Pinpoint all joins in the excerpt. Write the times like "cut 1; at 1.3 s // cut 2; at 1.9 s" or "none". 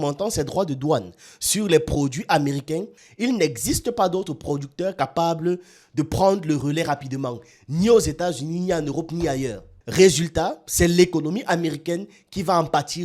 cut 1; at 2.9 s